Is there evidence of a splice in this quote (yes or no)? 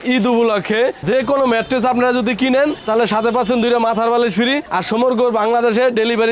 no